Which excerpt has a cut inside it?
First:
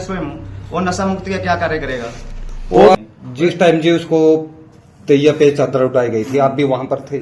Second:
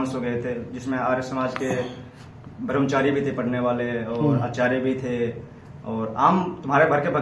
first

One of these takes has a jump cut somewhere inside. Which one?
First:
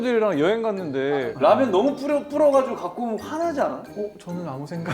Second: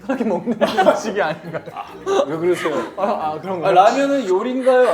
first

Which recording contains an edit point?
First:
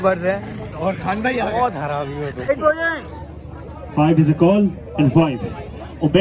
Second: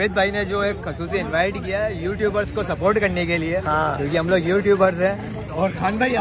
first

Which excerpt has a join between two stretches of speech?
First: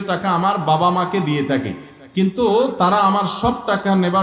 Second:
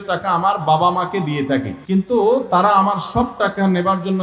second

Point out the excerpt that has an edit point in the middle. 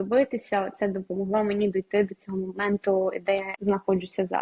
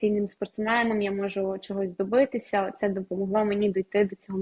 first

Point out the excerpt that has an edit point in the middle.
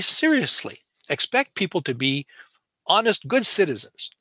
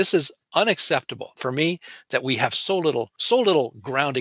second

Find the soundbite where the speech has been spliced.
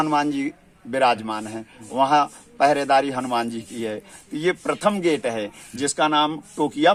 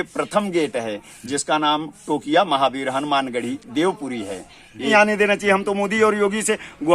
second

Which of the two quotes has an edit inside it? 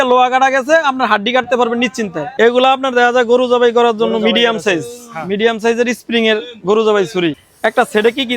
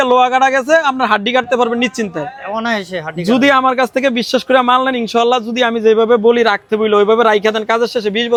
first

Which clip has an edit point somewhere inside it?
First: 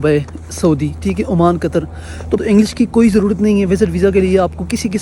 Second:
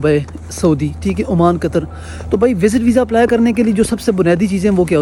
first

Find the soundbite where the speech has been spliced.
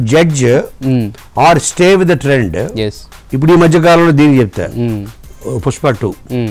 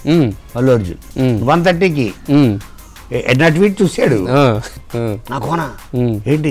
second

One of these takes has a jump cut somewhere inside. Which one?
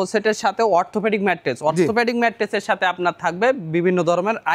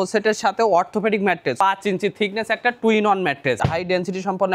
second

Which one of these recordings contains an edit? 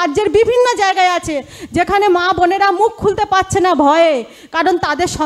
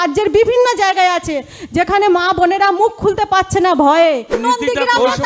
second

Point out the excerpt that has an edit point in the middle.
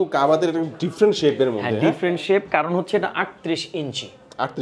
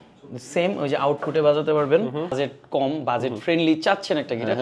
second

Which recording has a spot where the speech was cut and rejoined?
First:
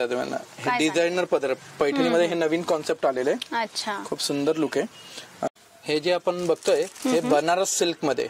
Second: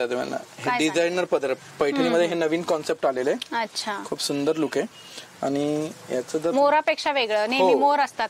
first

